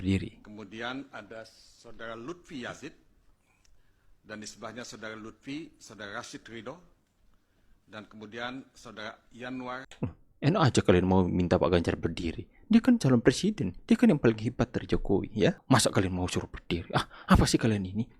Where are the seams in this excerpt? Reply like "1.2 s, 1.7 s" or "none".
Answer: 9.9 s